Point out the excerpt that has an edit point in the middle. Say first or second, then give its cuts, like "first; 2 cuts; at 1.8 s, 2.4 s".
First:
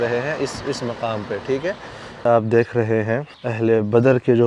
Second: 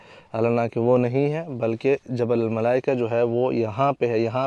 first; 2 cuts; at 2.2 s, 3.4 s